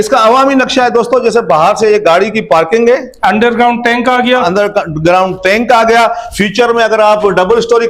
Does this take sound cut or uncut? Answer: uncut